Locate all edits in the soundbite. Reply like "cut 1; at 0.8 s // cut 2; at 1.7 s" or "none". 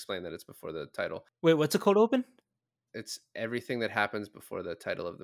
cut 1; at 1.2 s